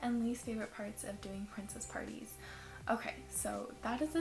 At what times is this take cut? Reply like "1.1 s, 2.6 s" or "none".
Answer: none